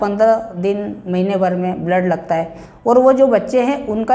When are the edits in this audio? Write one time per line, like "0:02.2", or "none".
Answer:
0:02.6